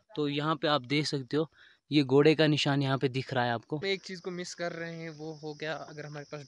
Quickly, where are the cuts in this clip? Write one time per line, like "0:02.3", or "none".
0:03.8